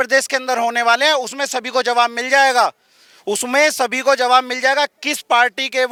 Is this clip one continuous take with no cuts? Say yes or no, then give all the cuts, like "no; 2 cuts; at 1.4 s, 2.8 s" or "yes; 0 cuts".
yes; 0 cuts